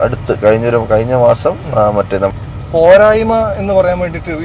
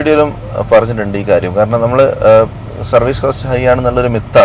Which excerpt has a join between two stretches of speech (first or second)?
first